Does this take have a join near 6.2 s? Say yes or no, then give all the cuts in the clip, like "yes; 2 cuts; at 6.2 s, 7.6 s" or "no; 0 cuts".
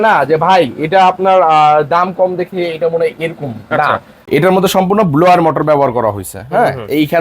no; 1 cut; at 4.3 s